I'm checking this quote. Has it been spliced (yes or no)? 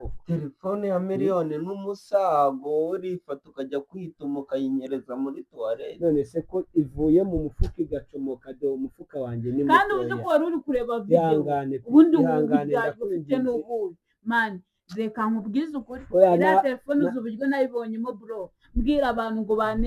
no